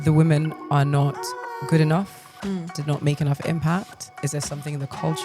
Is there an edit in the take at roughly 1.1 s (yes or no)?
no